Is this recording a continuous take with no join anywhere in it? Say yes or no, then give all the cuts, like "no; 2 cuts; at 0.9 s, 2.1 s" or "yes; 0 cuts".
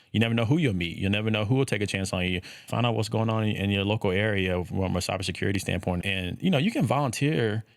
no; 2 cuts; at 2.6 s, 6.0 s